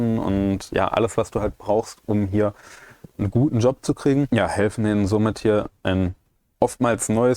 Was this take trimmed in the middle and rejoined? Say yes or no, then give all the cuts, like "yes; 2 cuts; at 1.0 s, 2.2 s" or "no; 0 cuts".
yes; 1 cut; at 4.3 s